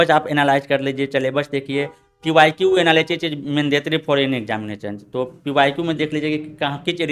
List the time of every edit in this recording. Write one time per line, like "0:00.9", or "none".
none

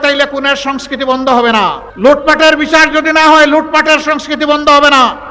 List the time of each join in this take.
0:01.8

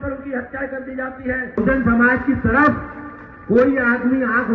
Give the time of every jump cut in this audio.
0:01.6

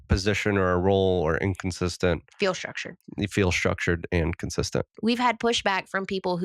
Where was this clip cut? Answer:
0:04.9

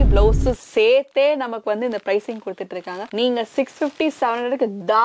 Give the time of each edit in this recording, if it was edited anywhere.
none

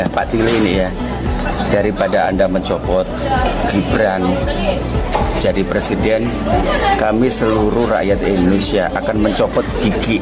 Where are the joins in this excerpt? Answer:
none

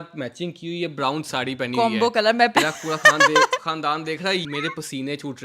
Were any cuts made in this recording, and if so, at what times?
0:02.5
0:04.4

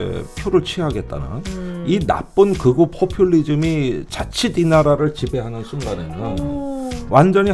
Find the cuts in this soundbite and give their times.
none

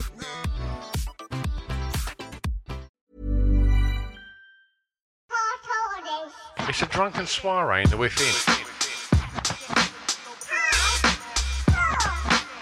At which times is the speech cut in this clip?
0:02.9
0:05.1

